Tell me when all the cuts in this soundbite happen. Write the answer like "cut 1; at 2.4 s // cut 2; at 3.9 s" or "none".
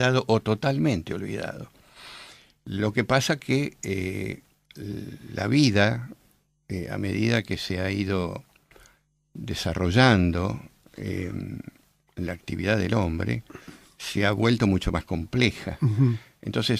cut 1; at 11.1 s